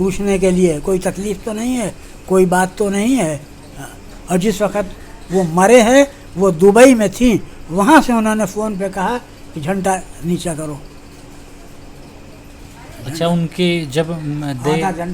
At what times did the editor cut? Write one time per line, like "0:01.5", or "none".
0:12.4